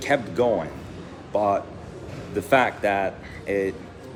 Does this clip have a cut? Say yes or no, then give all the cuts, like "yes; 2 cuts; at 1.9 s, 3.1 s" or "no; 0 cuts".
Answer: no; 0 cuts